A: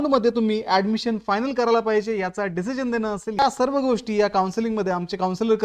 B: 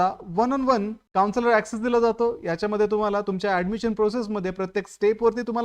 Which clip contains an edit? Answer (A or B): B